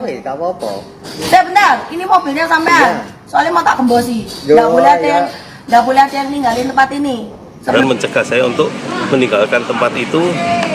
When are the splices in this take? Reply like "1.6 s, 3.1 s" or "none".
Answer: 1.1 s, 7.7 s